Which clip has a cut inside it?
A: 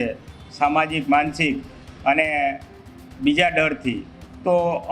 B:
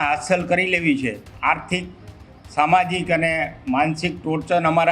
B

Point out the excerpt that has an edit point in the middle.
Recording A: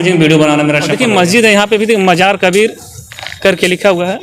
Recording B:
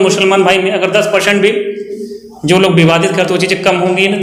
A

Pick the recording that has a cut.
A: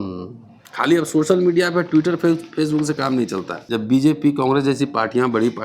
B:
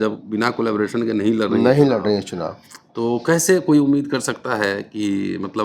A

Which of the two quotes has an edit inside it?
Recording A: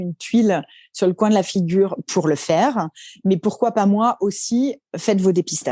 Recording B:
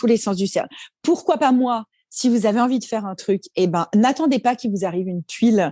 A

